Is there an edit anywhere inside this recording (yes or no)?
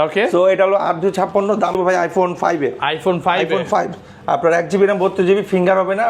yes